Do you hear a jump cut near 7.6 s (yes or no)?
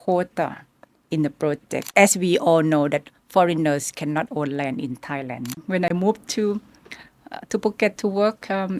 no